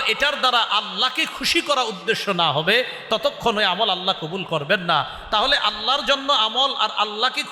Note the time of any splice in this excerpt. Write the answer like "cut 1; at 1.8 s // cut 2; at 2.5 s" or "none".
none